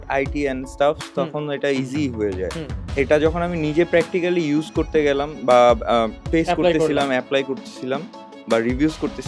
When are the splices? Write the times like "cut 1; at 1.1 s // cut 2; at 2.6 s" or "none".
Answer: cut 1; at 2.8 s // cut 2; at 6.2 s